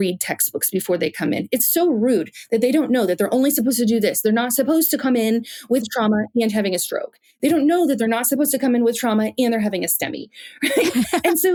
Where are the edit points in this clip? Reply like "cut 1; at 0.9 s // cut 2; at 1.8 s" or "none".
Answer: none